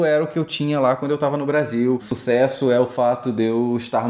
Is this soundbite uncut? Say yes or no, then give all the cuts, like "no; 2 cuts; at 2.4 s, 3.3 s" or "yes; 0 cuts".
no; 1 cut; at 2.1 s